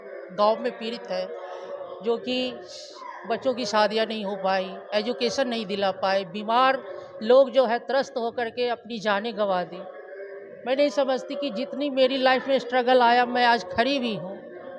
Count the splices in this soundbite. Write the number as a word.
zero